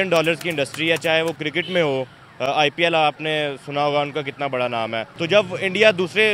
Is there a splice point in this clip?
yes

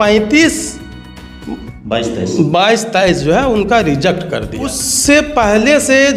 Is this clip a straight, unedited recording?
no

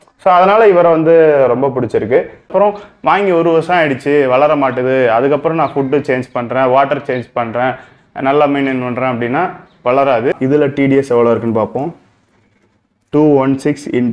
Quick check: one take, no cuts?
no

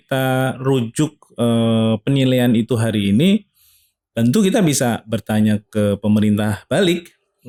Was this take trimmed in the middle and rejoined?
no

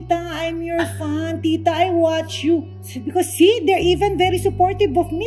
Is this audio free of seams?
yes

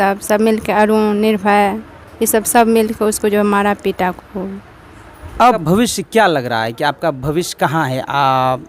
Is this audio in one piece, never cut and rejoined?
no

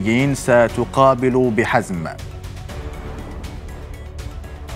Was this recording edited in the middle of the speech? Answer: no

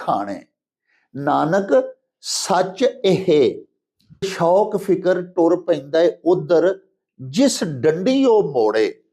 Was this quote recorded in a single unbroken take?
no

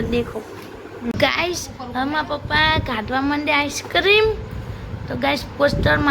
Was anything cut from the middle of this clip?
yes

